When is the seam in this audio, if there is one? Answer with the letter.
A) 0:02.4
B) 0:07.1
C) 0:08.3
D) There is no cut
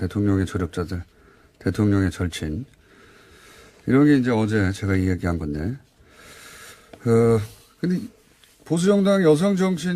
A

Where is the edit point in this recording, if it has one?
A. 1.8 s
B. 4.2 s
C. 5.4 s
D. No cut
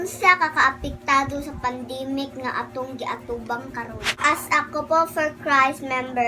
B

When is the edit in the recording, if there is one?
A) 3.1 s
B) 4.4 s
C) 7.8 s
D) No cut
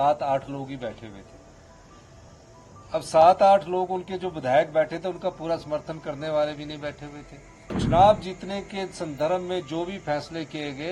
C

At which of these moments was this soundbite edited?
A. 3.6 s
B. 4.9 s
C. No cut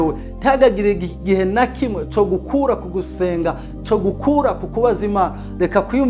C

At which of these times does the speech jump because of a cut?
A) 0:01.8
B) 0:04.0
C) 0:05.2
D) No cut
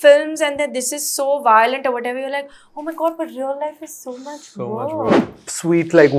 C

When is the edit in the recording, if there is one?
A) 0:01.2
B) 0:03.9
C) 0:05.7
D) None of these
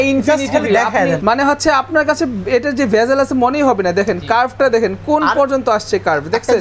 A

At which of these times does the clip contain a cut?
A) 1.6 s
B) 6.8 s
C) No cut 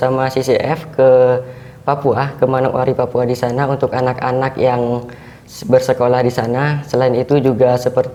C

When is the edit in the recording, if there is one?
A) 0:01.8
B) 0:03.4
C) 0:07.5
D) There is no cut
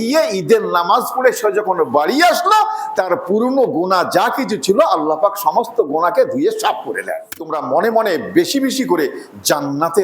C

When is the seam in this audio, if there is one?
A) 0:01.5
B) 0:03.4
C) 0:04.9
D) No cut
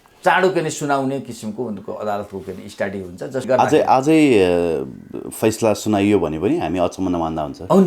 B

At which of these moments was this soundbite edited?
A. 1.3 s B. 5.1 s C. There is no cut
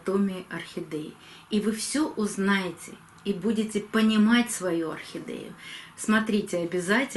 C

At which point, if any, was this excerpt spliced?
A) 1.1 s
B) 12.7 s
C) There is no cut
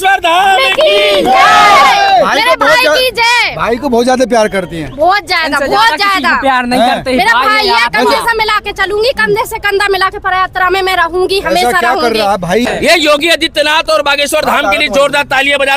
B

